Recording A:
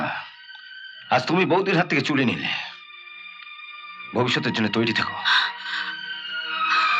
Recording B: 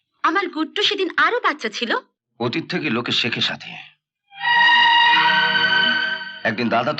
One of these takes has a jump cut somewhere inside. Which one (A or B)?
B